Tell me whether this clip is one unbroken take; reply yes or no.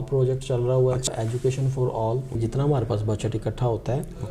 no